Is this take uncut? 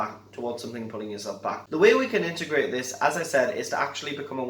no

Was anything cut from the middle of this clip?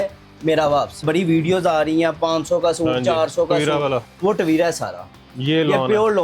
yes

